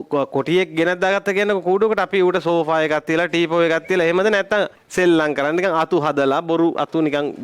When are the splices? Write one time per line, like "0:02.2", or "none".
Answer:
0:04.8